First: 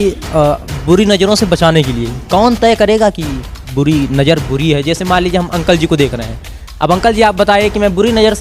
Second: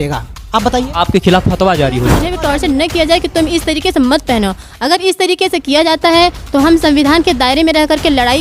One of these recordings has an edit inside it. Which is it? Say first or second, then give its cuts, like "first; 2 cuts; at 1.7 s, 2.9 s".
second; 1 cut; at 2.3 s